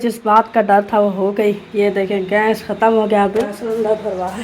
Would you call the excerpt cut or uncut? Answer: cut